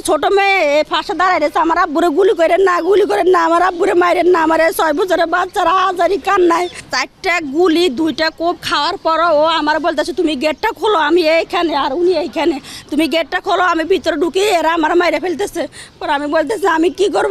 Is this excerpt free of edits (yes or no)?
no